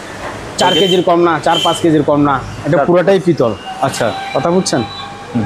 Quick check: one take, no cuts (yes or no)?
yes